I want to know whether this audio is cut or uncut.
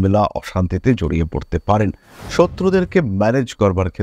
cut